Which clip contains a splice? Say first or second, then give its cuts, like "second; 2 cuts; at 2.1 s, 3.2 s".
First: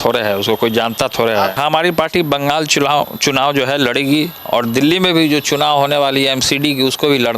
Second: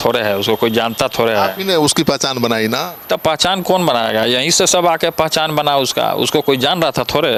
first; 1 cut; at 1.5 s